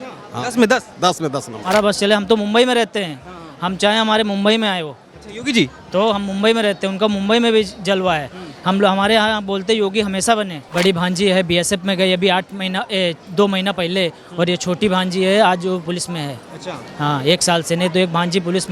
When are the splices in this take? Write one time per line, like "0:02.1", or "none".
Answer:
0:01.7
0:10.6